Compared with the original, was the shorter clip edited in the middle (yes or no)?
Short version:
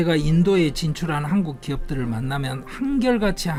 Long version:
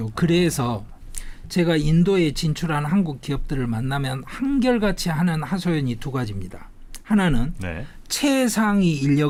no